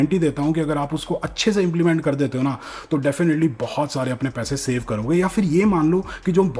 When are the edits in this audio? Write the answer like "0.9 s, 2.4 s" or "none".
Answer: none